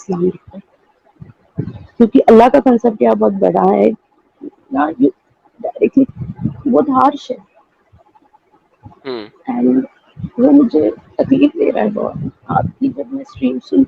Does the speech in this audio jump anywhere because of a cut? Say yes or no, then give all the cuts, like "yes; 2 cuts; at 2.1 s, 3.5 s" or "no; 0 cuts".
yes; 1 cut; at 6.1 s